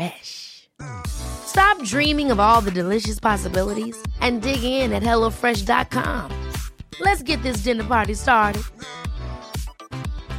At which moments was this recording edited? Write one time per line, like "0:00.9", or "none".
none